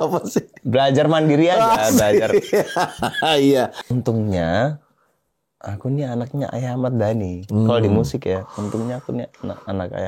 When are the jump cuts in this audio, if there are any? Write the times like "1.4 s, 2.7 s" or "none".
3.7 s

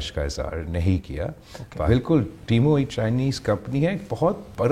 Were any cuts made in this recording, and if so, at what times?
1.9 s

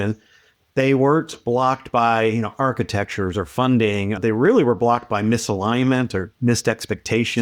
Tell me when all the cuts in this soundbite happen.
4.2 s

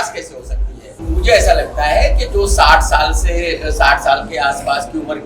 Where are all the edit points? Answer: 1.0 s

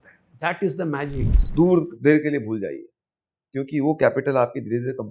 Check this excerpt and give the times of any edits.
1.4 s

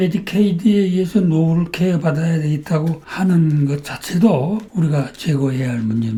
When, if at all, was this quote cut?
none

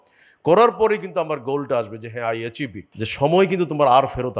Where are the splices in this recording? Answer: 2.8 s

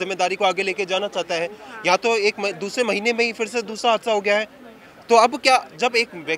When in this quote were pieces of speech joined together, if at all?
none

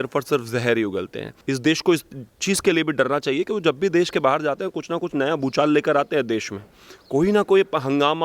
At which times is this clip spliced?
1.3 s

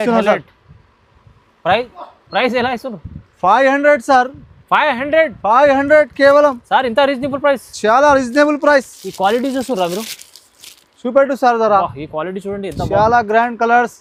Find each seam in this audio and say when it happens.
none

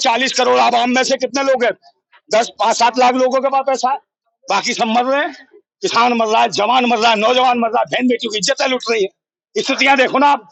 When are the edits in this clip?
none

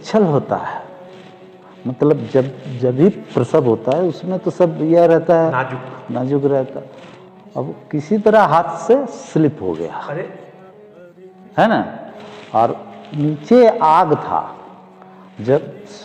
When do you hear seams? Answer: none

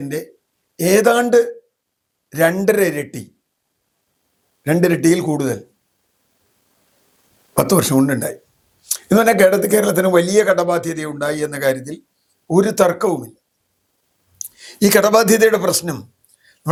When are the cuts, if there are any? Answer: none

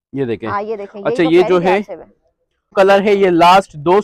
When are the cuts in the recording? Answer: 2.7 s

